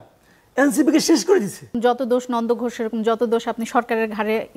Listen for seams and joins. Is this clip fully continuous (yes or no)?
no